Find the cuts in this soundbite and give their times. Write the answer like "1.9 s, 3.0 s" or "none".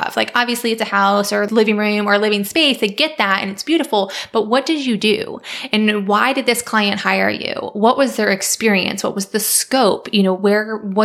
1.5 s